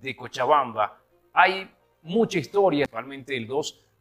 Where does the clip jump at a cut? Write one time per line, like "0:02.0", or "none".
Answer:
0:03.0